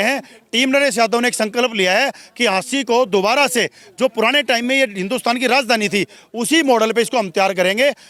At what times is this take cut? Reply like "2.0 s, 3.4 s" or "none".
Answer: none